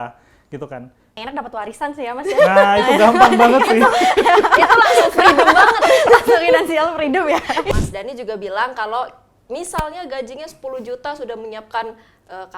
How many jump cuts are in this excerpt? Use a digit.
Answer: 2